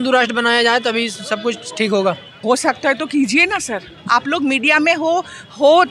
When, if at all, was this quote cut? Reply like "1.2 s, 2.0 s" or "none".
none

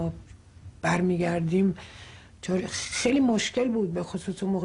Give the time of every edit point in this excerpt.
1.6 s

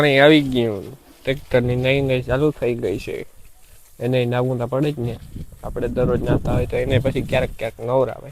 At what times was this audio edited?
none

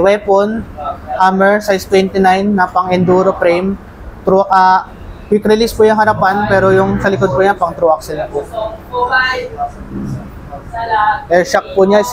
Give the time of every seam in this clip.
none

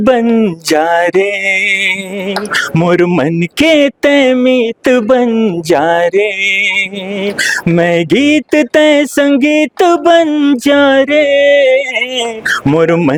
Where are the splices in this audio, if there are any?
none

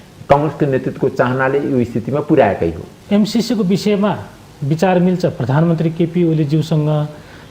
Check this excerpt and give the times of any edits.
2.9 s

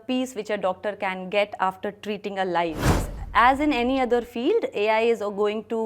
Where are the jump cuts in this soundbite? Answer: 3.2 s

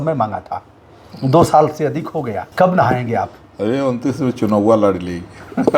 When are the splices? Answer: 2.4 s

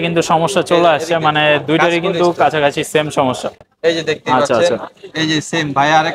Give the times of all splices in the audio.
none

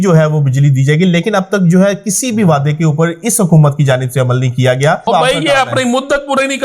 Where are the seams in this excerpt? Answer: 5.1 s

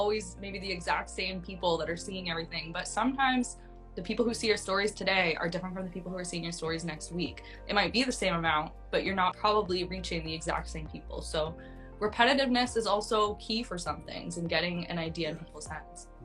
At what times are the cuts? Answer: 9.4 s

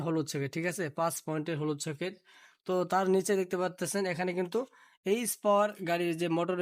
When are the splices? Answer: none

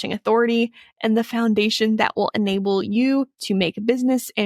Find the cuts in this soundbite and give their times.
none

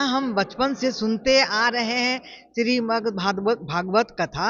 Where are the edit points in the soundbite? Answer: none

